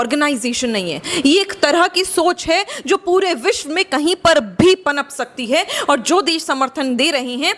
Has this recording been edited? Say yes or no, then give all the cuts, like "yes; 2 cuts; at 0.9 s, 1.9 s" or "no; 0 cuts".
no; 0 cuts